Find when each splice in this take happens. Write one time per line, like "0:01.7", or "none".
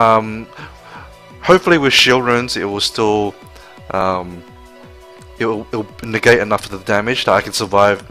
0:01.4